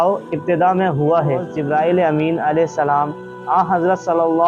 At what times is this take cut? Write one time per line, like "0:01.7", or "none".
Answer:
0:01.5